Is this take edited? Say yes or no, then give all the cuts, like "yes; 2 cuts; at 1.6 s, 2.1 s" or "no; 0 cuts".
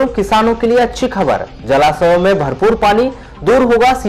no; 0 cuts